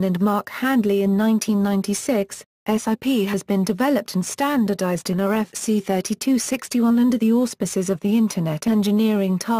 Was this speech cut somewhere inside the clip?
yes; 2 cuts; at 0.9 s, 5.6 s

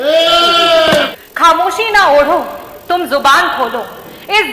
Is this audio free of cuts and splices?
no; 1 cut; at 1.1 s

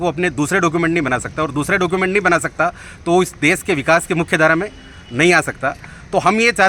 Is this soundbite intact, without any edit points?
yes; 0 cuts

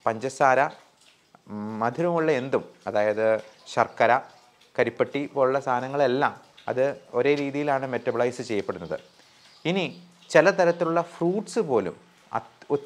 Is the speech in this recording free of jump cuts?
yes; 0 cuts

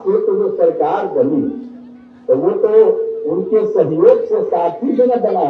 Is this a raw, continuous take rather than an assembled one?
yes; 0 cuts

